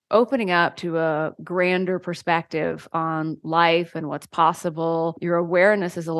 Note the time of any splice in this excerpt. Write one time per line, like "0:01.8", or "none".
0:05.1